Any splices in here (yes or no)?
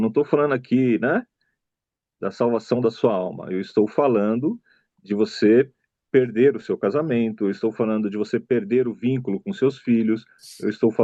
no